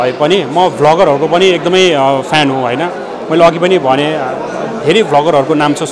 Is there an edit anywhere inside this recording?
no; 0 cuts

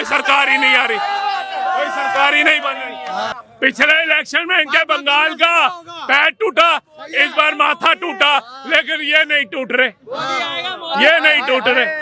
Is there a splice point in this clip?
yes; 1 cut; at 3.4 s

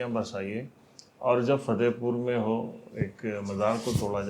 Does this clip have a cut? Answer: no; 0 cuts

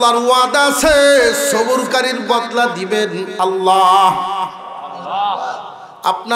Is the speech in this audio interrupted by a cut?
no; 0 cuts

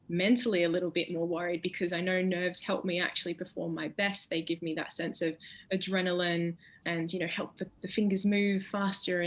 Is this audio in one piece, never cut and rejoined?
no; 1 cut; at 6.7 s

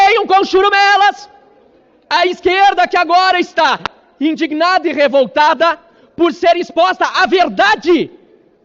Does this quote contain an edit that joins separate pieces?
no; 0 cuts

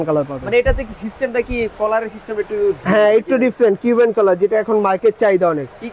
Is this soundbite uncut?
yes; 0 cuts

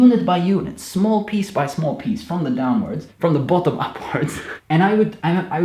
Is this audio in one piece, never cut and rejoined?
no; 2 cuts; at 3.1 s, 4.5 s

